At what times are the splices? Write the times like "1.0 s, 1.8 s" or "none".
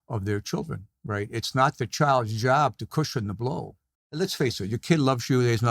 4.0 s